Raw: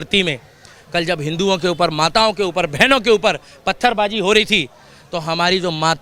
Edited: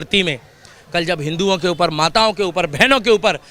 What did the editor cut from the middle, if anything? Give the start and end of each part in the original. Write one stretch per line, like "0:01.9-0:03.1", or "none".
none